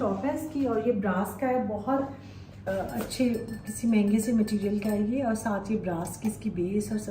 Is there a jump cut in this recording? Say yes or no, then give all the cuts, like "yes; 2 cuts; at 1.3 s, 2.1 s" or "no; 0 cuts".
yes; 1 cut; at 2.6 s